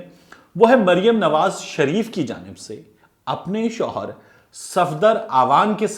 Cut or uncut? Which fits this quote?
uncut